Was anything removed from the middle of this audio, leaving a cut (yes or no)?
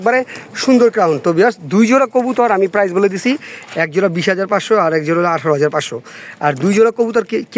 no